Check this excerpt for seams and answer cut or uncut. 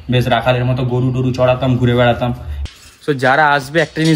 cut